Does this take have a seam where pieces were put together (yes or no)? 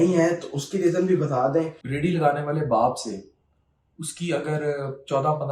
yes